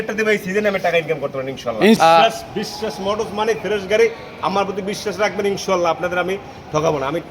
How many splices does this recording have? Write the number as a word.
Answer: one